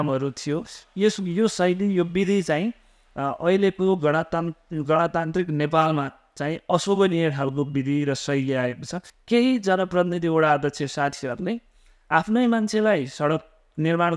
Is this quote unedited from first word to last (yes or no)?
no